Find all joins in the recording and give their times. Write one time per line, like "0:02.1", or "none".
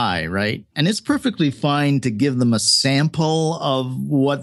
none